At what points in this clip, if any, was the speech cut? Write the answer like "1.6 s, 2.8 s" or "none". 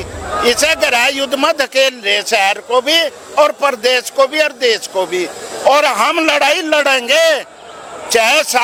none

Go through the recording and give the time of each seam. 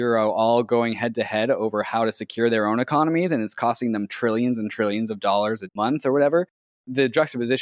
5.7 s, 6.8 s

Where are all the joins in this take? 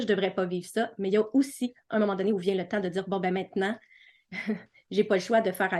none

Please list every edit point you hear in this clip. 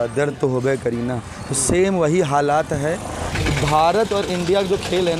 3.3 s

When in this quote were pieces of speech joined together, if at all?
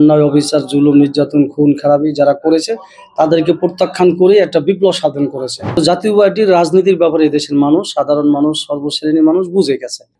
5.8 s

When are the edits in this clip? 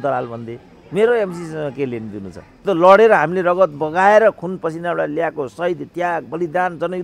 2.6 s

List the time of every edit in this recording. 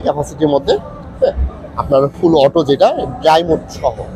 none

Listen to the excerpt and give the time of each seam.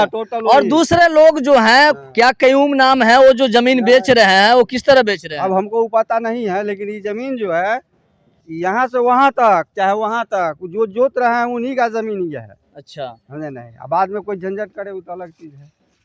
none

